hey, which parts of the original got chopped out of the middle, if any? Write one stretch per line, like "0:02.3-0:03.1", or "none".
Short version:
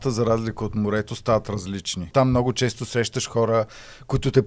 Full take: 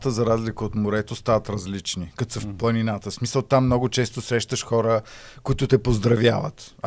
0:02.1-0:03.5